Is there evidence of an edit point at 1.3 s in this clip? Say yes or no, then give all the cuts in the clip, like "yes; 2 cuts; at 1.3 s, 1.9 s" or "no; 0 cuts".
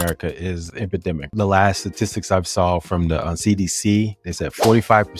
yes; 1 cut; at 1.3 s